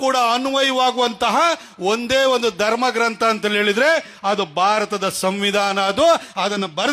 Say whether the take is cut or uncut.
uncut